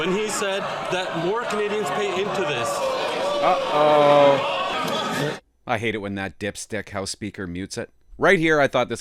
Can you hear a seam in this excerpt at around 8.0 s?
yes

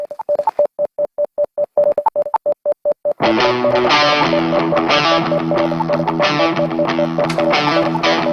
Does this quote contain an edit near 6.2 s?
no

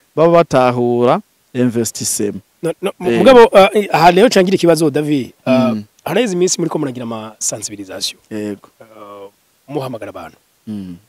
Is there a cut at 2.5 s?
yes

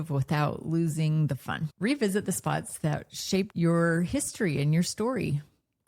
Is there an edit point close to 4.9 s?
no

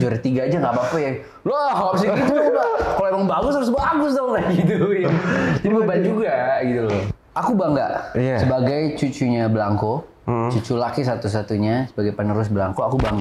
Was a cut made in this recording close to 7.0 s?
yes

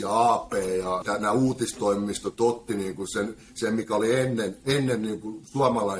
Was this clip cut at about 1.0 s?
yes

